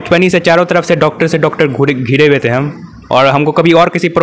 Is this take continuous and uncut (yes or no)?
yes